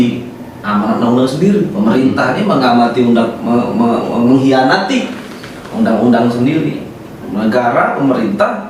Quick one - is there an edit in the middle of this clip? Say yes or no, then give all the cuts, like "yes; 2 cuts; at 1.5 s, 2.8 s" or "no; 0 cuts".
no; 0 cuts